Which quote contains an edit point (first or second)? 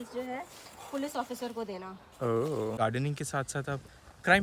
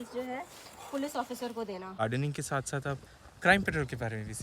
second